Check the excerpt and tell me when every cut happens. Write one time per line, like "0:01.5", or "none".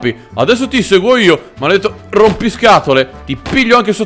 none